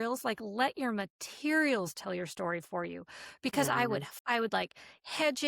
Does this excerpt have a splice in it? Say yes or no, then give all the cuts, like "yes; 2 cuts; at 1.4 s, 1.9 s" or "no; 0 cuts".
yes; 1 cut; at 4.1 s